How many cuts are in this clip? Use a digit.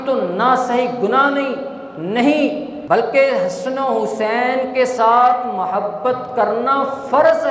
1